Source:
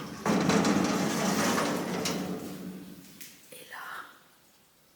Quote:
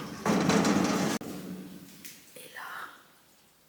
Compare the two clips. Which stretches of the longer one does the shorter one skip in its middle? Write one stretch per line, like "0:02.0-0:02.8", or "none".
0:01.2-0:02.3